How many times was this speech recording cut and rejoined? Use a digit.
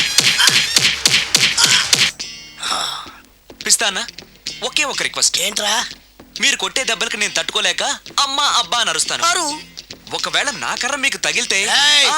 1